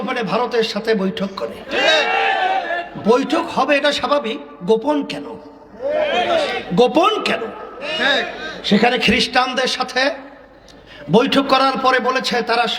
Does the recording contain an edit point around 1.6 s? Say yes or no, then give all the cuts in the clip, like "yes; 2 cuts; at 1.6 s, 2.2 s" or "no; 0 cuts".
no; 0 cuts